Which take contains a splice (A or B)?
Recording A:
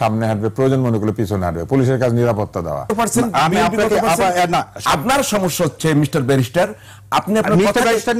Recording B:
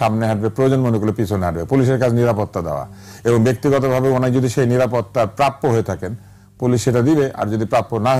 A